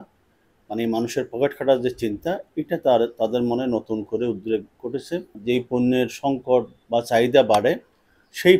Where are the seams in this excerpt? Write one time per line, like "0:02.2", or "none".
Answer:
0:05.4
0:06.8